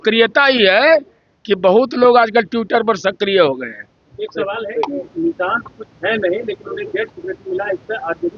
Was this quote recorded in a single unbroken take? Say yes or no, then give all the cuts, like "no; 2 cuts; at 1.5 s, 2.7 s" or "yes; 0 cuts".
yes; 0 cuts